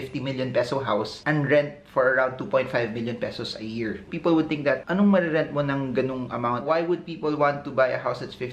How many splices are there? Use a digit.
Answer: 1